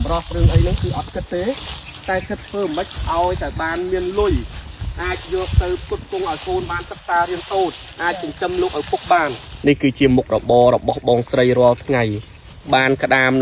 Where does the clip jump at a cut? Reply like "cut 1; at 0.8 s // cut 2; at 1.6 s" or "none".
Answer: cut 1; at 9.4 s